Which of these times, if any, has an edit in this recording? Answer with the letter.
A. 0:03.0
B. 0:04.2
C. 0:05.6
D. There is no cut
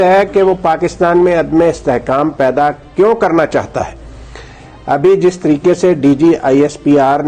D